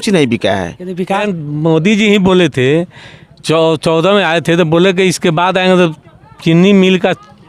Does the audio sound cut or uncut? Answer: cut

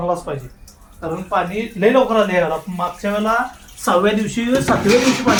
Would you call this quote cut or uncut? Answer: uncut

